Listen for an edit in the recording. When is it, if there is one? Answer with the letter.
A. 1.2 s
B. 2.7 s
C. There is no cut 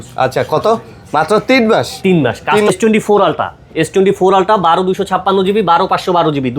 B